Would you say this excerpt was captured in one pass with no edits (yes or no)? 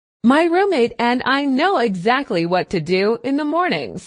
yes